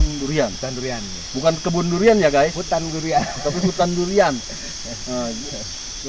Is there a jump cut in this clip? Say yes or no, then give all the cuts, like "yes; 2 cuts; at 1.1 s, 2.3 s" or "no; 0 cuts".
no; 0 cuts